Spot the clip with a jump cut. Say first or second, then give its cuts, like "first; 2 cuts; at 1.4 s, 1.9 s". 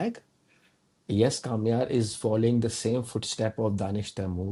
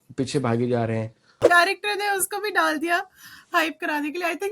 second; 1 cut; at 1.4 s